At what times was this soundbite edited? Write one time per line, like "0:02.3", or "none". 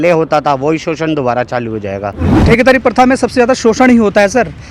0:02.4